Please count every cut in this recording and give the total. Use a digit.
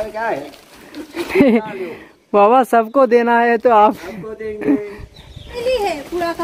1